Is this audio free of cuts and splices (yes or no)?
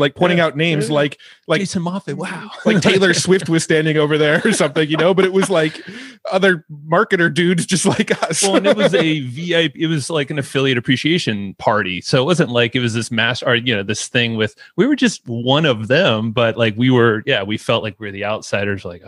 yes